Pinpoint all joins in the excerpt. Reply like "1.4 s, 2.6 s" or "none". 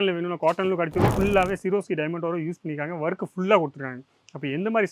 1.1 s